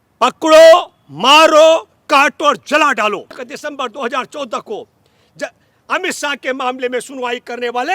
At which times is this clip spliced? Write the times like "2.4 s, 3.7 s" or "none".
3.5 s